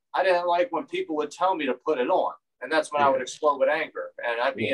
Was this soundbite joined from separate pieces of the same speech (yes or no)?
no